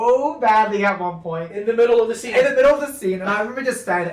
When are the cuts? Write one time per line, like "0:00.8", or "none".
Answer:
none